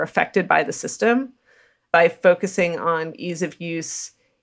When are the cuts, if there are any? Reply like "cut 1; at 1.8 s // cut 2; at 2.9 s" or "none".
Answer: cut 1; at 1.8 s // cut 2; at 3.1 s